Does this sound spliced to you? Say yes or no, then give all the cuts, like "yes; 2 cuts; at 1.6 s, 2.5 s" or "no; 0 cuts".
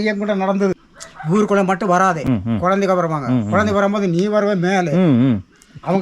yes; 2 cuts; at 0.9 s, 2.2 s